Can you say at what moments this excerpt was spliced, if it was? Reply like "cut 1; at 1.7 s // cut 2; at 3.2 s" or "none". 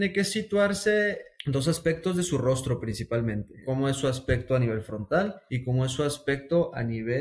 cut 1; at 3.5 s